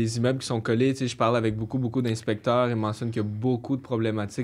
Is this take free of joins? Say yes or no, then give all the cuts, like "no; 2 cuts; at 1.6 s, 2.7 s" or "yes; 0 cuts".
yes; 0 cuts